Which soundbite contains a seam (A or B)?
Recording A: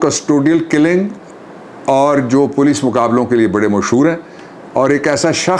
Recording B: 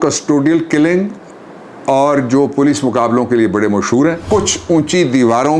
B